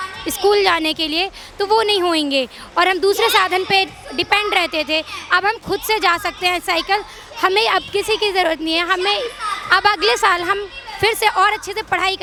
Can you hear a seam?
no; 0 cuts

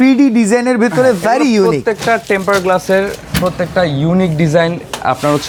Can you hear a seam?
no; 0 cuts

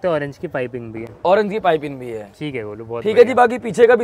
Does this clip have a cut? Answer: no; 0 cuts

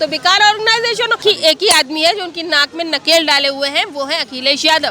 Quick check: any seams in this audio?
yes; 1 cut; at 1.2 s

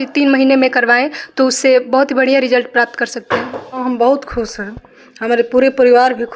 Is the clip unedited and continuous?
no; 1 cut; at 3.8 s

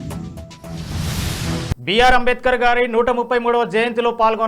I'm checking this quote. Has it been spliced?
yes; 1 cut; at 1.3 s

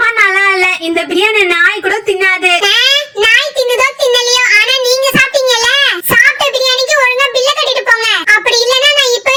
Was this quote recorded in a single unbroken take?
yes; 0 cuts

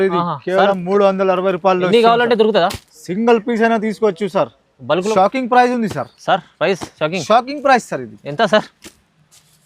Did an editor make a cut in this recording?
yes; 1 cut; at 5.0 s

